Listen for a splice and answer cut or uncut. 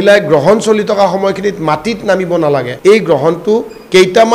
cut